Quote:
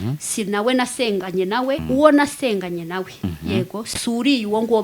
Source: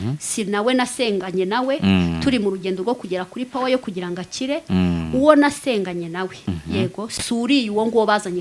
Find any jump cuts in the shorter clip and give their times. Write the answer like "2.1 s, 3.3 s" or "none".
1.8 s